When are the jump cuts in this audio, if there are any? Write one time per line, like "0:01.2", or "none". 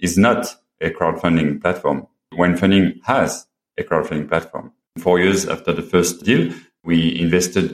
0:00.8
0:05.0
0:06.3